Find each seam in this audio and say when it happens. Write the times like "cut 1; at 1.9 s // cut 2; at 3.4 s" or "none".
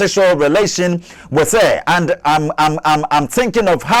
none